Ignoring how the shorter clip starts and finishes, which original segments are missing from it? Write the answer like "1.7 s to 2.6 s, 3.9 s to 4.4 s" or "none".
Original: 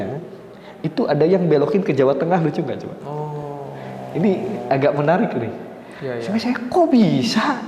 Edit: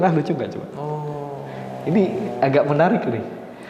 none